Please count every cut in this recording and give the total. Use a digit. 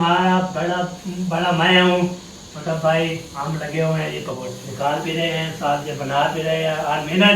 1